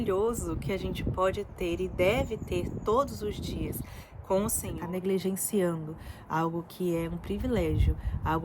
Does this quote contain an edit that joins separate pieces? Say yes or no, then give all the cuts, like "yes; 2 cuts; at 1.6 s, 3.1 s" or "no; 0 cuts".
yes; 1 cut; at 4.8 s